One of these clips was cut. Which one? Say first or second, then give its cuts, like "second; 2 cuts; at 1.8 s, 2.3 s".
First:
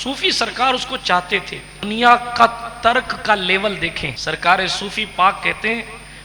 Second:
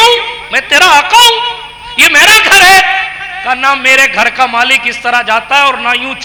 first; 2 cuts; at 1.8 s, 4.1 s